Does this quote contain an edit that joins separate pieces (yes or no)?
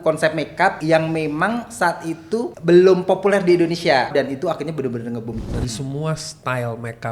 yes